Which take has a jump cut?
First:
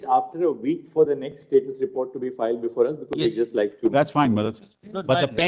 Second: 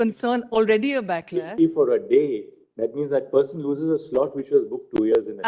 second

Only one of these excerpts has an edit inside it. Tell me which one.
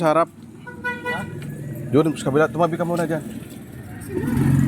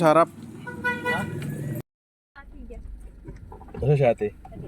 second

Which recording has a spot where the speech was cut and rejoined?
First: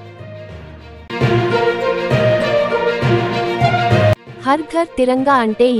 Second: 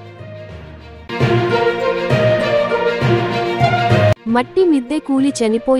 second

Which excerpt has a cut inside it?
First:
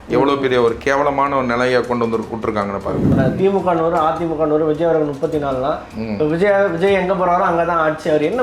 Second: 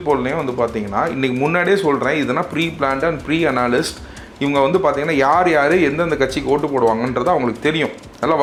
first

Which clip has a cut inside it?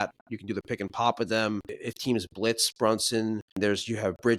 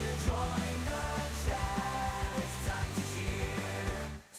first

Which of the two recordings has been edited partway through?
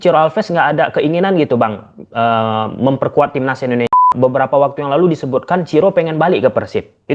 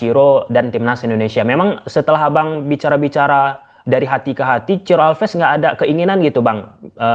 first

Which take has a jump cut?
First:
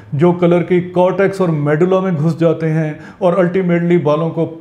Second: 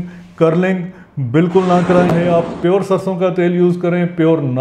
second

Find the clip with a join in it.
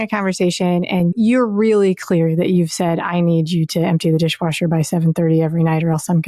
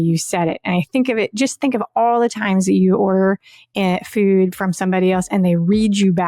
first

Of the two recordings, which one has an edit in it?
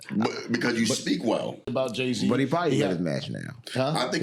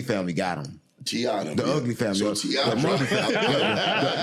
first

